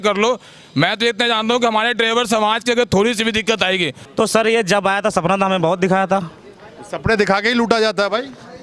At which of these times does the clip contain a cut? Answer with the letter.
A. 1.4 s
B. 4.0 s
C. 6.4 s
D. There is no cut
B